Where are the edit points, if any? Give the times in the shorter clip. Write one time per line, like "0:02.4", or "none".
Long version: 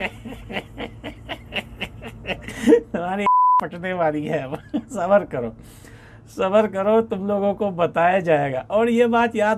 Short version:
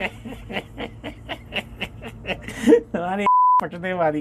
none